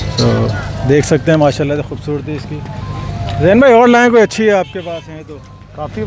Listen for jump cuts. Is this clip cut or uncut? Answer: uncut